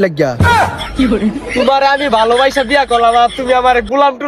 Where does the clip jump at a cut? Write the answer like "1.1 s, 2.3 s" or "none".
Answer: none